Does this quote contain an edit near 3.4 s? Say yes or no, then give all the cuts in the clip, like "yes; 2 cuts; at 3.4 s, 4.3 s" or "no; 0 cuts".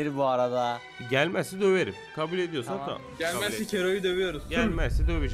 no; 2 cuts; at 0.9 s, 2.0 s